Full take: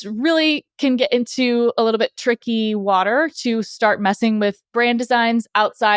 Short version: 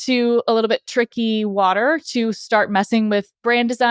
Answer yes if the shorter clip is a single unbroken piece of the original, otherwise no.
yes